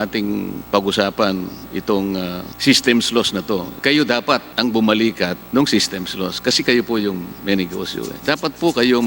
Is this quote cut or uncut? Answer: cut